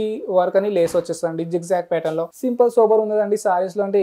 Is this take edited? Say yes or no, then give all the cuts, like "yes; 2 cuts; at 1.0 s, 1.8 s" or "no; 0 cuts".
yes; 1 cut; at 2.3 s